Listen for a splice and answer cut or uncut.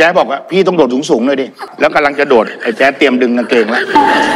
cut